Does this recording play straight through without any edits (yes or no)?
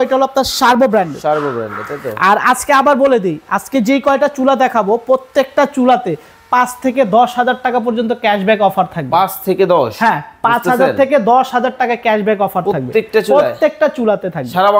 yes